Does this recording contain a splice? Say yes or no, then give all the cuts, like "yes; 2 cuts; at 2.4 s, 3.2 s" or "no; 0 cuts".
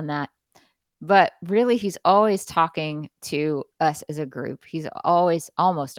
no; 0 cuts